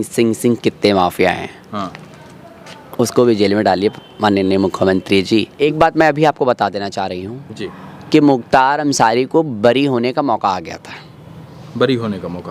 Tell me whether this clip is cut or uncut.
uncut